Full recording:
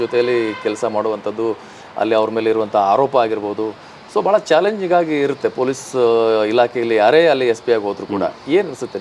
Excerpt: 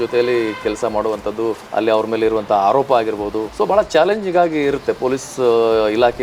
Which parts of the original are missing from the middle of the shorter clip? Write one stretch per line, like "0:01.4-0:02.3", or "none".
0:01.6-0:01.9
0:03.7-0:04.0